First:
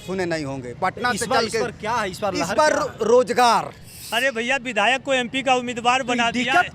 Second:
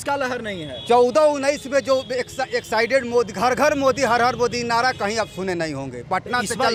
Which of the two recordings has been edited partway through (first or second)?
first